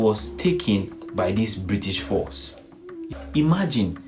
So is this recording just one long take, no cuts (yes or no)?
no